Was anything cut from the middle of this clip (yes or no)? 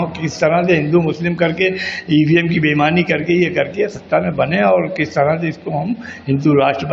no